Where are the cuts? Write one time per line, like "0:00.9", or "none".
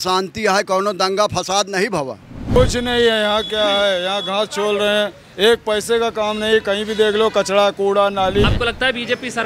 0:02.6
0:08.4